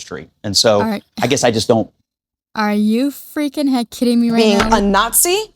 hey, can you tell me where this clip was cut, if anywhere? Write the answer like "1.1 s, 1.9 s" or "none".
4.4 s